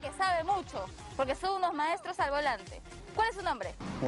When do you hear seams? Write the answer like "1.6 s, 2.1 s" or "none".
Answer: none